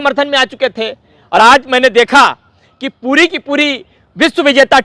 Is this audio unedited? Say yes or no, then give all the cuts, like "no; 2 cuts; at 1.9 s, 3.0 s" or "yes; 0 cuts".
yes; 0 cuts